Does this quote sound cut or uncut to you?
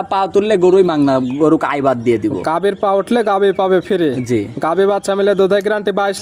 uncut